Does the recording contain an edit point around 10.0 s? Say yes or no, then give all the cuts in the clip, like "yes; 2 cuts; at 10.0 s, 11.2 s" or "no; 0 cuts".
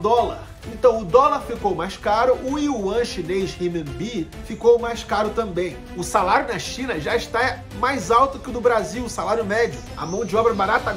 yes; 2 cuts; at 5.9 s, 10.0 s